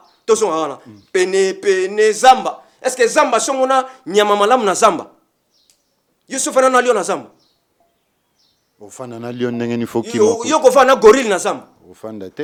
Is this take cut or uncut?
uncut